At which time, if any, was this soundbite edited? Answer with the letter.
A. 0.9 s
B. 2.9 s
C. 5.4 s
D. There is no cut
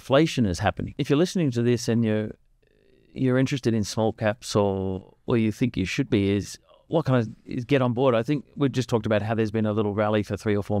A